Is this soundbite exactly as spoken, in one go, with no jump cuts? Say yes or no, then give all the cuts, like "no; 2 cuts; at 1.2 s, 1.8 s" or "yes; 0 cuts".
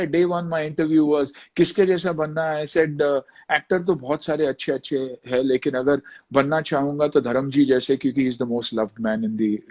yes; 0 cuts